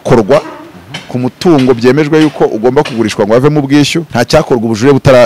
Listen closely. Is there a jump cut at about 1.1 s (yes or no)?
no